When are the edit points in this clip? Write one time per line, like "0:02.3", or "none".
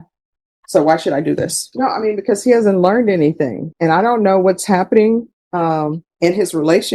0:01.6
0:03.6
0:05.4